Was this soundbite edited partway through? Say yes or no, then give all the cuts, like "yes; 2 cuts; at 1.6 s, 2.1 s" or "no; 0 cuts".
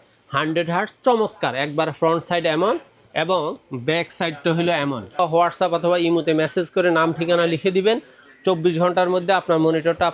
yes; 1 cut; at 5.2 s